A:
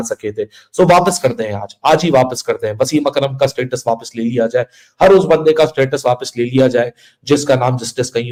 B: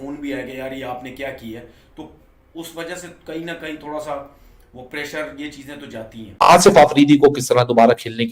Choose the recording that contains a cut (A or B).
B